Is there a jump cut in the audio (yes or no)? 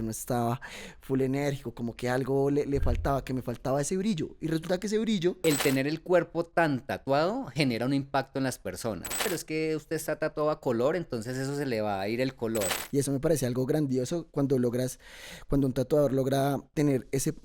yes